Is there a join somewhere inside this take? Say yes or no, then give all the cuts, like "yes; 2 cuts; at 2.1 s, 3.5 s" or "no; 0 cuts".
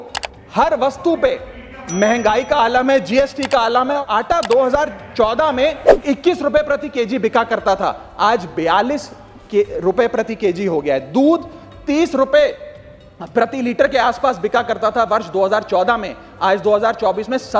yes; 1 cut; at 4.0 s